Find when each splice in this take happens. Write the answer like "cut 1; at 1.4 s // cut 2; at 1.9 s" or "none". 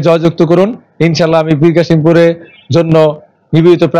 none